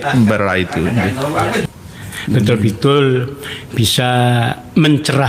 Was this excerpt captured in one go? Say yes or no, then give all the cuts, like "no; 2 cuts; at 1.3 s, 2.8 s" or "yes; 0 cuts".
no; 1 cut; at 1.6 s